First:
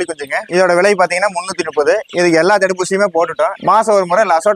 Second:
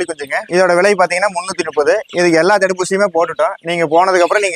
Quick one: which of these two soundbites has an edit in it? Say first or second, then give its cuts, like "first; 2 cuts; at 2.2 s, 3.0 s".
first; 1 cut; at 3.6 s